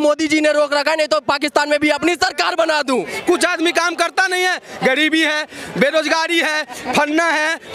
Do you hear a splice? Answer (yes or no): yes